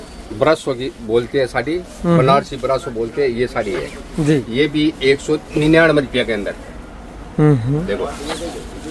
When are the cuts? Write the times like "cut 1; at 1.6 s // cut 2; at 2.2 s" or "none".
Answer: none